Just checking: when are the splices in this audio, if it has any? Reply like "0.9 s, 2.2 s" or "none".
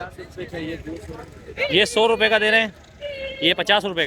none